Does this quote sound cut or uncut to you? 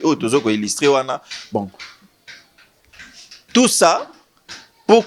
uncut